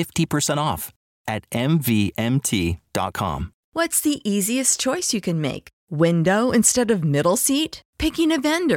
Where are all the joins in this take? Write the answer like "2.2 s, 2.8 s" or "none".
3.7 s